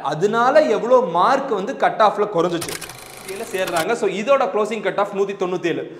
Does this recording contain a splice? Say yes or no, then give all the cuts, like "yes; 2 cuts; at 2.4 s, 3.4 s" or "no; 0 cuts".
yes; 1 cut; at 3.2 s